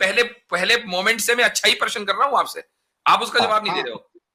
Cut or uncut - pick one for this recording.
uncut